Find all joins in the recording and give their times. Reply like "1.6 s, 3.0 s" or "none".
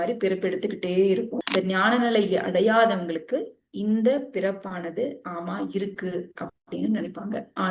1.4 s